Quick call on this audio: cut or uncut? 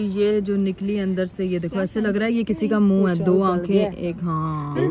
uncut